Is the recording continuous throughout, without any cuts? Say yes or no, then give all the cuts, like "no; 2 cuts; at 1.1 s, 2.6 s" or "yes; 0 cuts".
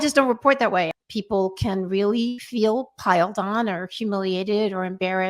no; 1 cut; at 0.9 s